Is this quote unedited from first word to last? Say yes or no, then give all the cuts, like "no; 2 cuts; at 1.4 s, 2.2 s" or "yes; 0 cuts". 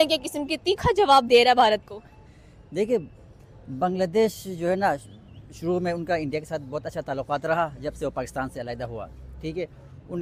yes; 0 cuts